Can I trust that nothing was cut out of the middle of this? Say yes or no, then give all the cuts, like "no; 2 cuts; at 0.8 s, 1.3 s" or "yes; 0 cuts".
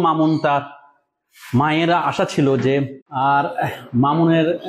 no; 1 cut; at 3.0 s